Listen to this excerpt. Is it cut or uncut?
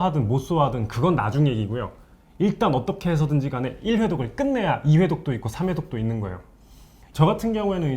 cut